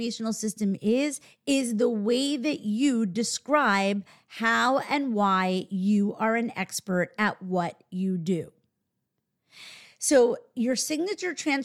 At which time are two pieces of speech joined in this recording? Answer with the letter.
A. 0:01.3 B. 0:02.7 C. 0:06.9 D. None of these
A